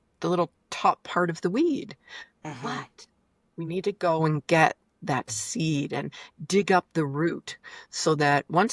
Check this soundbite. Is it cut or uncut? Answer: uncut